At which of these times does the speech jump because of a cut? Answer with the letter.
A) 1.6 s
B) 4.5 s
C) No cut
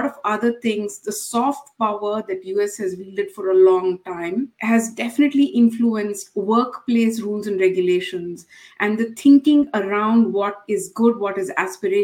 B